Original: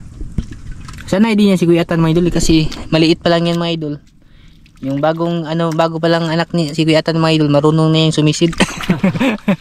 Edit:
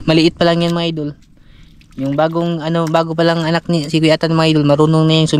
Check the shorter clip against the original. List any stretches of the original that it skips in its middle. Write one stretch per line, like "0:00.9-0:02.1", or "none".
none